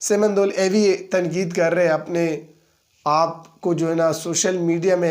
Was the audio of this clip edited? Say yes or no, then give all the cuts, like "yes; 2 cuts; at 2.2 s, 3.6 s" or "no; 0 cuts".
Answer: no; 0 cuts